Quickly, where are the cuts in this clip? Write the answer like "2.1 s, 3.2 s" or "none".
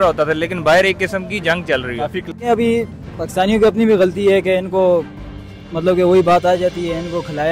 2.2 s